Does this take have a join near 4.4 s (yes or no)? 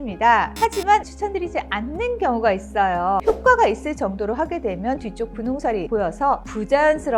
no